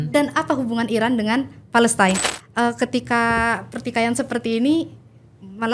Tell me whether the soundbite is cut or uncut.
cut